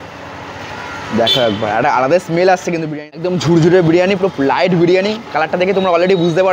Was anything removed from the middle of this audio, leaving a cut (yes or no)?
yes